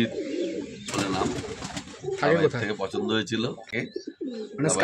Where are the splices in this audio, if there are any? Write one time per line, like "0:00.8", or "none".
0:03.7

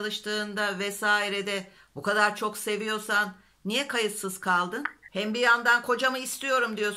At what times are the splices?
0:05.0

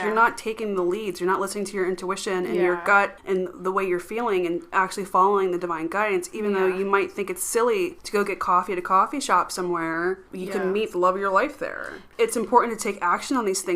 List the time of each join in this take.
0:03.2
0:08.0
0:10.3
0:12.0

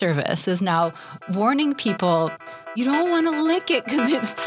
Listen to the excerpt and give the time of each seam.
0:02.7

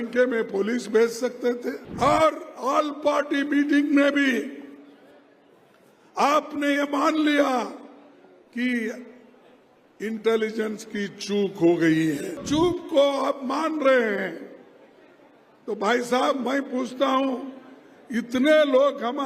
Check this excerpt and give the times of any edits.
0:01.8
0:12.4

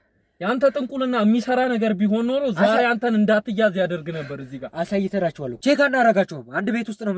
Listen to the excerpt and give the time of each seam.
0:05.6

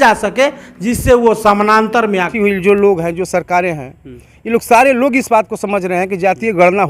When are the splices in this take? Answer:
0:02.3

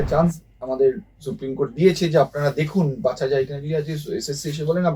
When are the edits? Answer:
none

